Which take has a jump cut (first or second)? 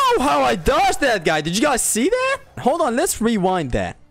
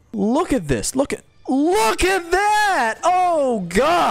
first